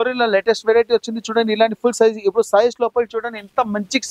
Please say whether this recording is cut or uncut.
uncut